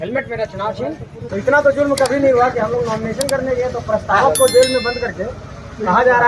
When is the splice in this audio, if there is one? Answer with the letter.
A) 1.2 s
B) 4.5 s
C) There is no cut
A